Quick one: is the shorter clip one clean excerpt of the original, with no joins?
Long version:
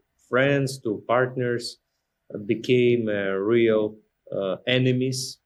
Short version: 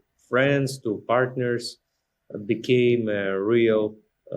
yes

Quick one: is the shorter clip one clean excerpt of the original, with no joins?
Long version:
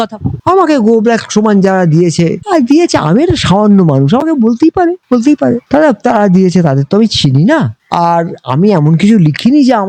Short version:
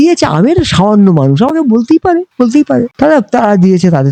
yes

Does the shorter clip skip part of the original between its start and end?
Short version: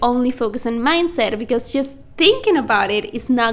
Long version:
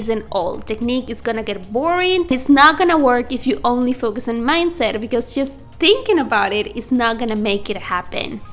no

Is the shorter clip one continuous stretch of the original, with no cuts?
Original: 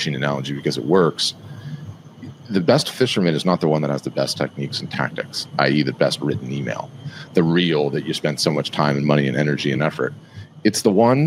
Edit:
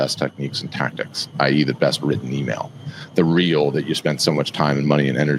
yes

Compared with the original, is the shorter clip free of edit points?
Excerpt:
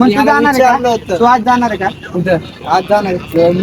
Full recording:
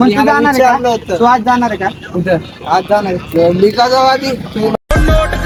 yes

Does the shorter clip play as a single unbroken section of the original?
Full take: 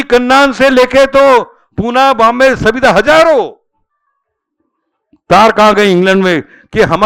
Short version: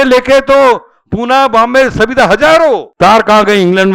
no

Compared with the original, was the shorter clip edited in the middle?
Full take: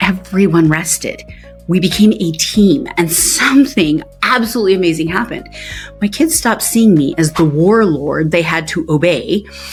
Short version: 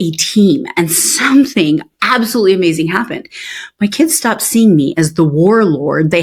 no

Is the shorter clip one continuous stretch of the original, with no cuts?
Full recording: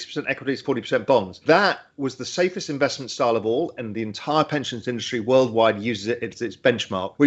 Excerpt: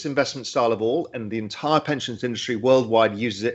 yes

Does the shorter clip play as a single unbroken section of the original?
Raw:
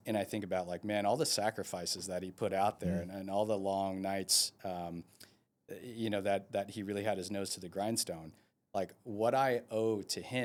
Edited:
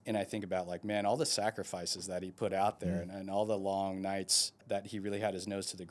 no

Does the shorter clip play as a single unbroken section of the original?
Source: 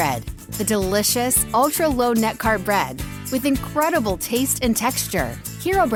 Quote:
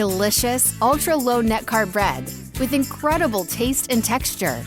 yes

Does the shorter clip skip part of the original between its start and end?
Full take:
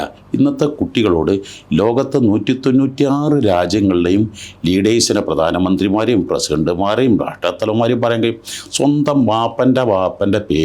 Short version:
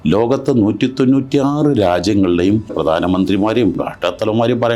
yes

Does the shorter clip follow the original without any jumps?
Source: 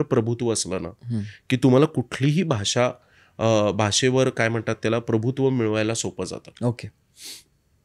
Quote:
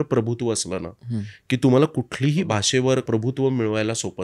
no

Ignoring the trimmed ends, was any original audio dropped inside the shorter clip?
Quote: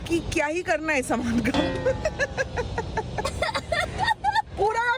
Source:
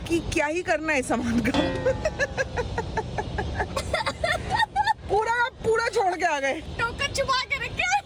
yes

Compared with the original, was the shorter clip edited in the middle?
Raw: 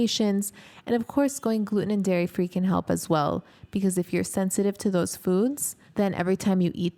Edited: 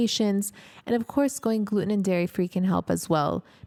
no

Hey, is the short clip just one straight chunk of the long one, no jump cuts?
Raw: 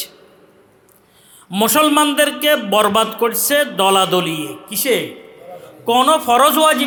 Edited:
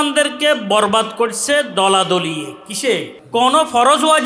no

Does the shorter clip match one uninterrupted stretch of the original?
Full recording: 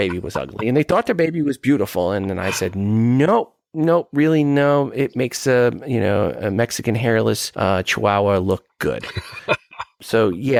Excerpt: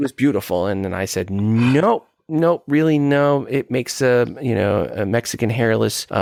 yes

